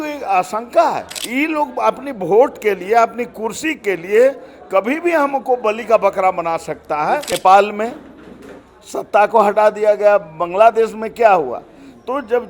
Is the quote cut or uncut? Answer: cut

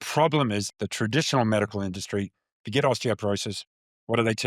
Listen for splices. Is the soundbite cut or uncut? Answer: uncut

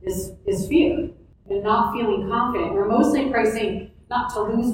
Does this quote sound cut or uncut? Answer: cut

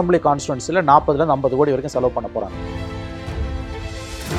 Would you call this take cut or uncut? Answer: cut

